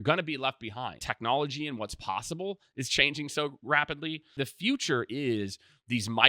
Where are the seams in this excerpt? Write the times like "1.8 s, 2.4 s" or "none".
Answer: 1.1 s, 4.3 s